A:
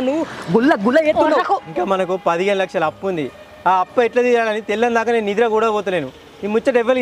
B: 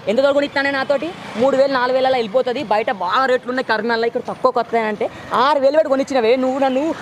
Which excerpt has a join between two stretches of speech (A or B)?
A